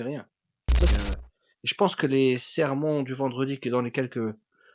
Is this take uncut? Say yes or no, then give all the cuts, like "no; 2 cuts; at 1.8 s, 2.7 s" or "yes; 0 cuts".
no; 1 cut; at 0.9 s